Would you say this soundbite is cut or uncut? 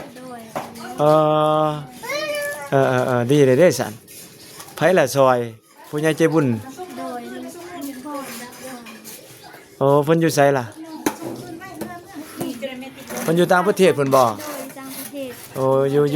uncut